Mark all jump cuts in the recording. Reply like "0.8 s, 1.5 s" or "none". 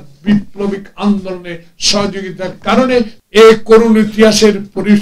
3.2 s